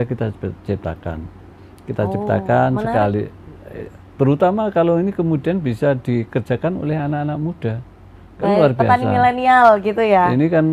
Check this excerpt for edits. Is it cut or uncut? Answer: uncut